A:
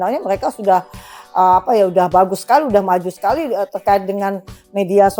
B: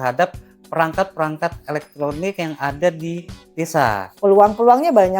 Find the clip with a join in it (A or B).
B